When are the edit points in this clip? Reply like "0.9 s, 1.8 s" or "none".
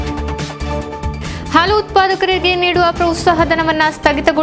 1.1 s